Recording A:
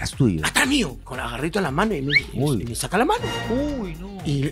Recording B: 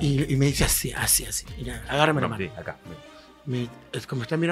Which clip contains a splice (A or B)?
A